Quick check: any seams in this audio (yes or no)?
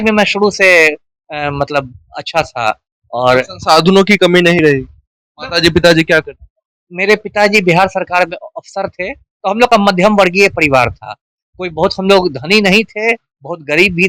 no